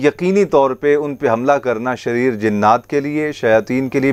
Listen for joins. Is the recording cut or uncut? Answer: uncut